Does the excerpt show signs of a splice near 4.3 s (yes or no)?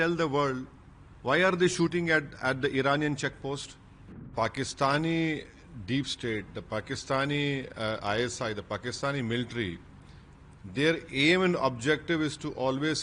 yes